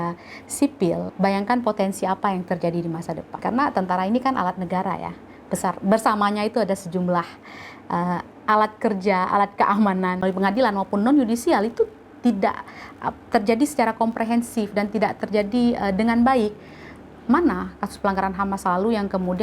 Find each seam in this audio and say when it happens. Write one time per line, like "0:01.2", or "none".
0:01.1
0:03.3
0:10.2